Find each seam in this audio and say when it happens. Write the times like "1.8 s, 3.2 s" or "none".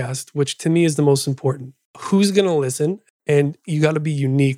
2.0 s, 3.0 s